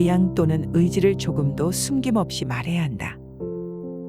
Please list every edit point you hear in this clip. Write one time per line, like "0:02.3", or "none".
0:03.0